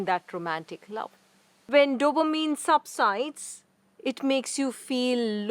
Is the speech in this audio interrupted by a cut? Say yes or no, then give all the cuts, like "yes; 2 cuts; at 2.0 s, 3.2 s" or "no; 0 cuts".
yes; 1 cut; at 1.7 s